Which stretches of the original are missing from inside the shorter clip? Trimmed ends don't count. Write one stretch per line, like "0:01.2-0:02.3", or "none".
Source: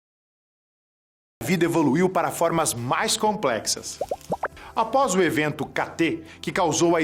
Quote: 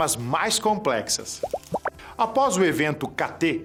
none